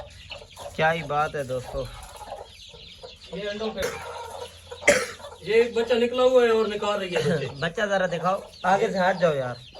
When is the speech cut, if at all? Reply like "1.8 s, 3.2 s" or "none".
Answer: 4.2 s